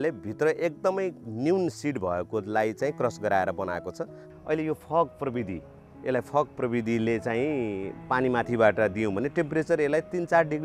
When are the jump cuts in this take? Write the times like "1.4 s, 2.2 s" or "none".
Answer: 4.2 s